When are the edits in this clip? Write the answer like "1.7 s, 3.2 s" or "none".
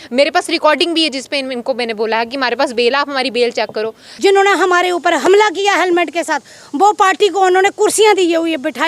4.1 s